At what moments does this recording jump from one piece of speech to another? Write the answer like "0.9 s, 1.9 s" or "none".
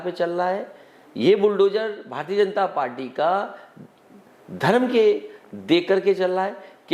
none